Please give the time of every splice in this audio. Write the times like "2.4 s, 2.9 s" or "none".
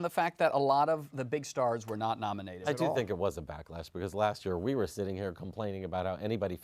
2.6 s